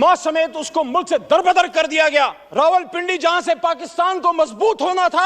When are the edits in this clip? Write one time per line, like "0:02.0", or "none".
0:02.4